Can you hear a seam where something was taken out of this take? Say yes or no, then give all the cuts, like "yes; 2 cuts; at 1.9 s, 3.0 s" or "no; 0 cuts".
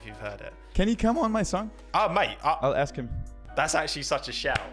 yes; 1 cut; at 3.1 s